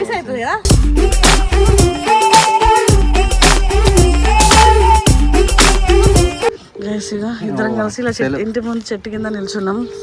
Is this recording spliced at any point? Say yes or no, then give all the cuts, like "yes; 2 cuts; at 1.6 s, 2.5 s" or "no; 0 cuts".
yes; 1 cut; at 6.7 s